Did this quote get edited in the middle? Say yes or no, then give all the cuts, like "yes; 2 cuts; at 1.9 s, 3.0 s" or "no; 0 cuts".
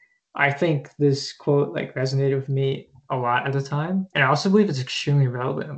yes; 1 cut; at 4.1 s